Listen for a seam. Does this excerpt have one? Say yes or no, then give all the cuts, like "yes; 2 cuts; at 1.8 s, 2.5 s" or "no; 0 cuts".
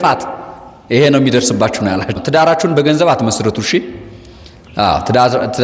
yes; 1 cut; at 2.1 s